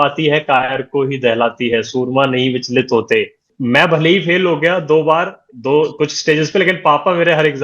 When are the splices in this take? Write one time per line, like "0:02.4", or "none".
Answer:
0:03.5